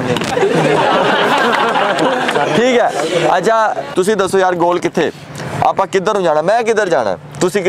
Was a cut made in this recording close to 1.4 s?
no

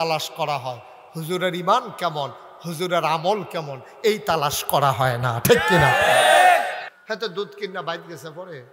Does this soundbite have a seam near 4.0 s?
no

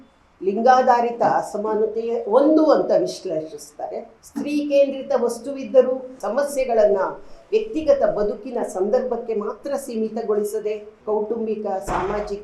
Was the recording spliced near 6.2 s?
yes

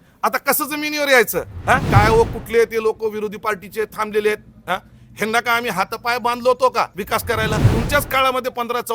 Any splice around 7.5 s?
yes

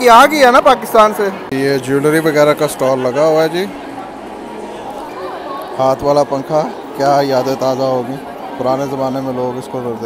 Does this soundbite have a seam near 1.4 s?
yes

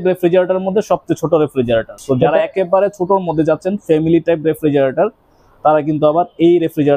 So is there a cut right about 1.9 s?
yes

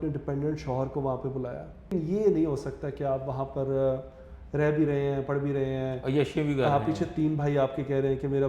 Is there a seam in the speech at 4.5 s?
no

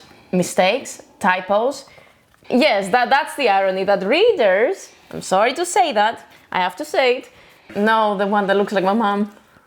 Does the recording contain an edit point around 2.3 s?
yes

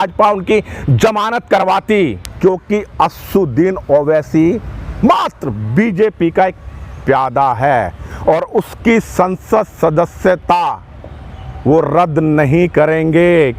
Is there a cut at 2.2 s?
yes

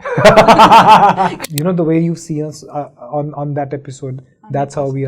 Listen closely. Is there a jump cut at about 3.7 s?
no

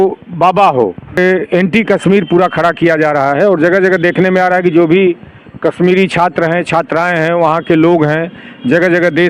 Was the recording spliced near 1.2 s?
yes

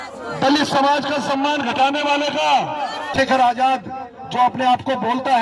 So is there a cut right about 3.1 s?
yes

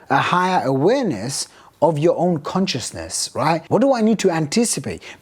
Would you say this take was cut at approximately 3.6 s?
yes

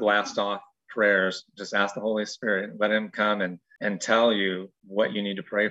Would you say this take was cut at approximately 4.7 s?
yes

